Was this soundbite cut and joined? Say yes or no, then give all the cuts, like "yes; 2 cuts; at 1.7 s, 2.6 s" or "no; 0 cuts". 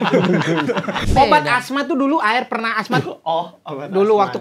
yes; 1 cut; at 1.0 s